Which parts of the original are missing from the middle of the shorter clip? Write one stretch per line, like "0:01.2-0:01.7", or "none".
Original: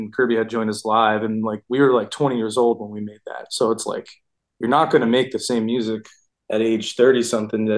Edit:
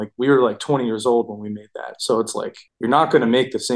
0:04.1-0:04.4